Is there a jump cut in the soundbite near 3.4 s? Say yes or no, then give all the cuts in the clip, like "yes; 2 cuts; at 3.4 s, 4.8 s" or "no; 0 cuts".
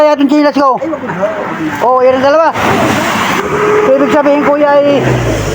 yes; 1 cut; at 3.4 s